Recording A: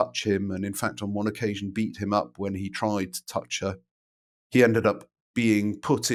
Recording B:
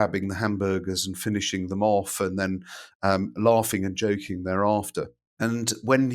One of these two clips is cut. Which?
B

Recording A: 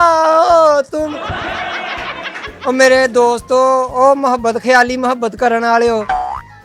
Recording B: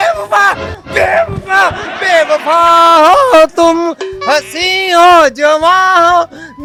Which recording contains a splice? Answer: A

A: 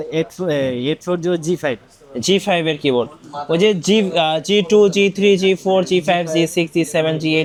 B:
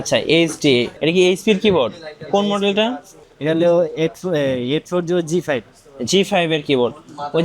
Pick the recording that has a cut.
B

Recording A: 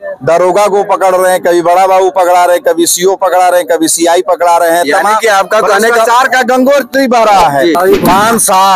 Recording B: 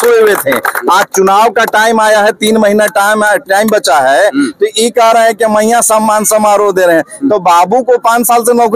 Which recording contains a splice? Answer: A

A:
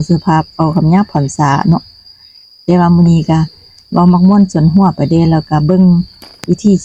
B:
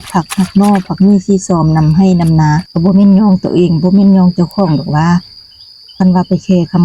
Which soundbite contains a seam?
B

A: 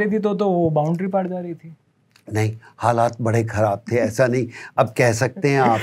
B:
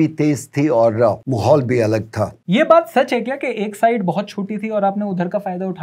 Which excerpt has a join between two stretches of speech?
B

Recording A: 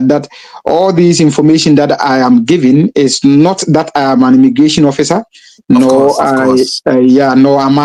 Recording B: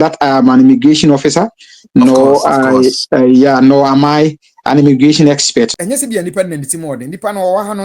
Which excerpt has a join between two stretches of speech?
B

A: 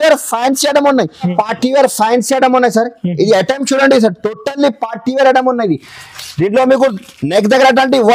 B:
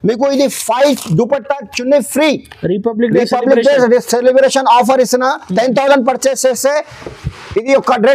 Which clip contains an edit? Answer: A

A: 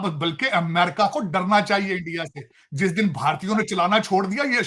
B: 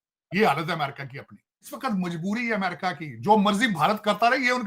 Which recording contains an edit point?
B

